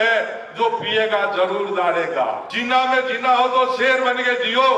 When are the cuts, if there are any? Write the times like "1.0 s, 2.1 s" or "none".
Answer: 2.5 s